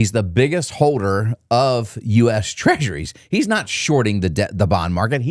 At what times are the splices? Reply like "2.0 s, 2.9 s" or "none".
none